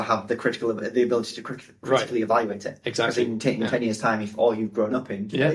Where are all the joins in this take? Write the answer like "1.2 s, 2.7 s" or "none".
none